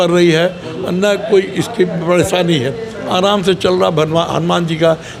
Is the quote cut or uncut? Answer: uncut